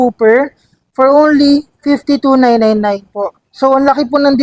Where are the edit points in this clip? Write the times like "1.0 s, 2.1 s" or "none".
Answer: none